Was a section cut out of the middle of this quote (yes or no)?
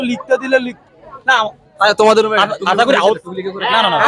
no